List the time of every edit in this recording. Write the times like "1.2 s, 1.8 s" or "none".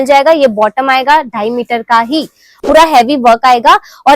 2.5 s